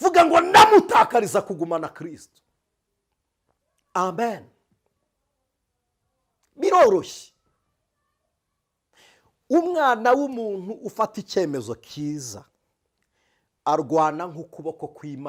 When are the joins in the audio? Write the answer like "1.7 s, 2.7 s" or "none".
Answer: none